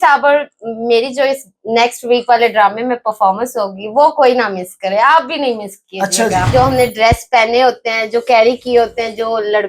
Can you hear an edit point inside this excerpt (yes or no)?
yes